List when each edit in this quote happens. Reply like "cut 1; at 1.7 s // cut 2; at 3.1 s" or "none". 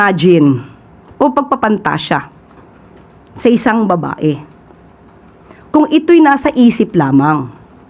none